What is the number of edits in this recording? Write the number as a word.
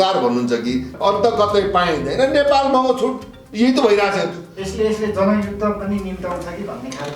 one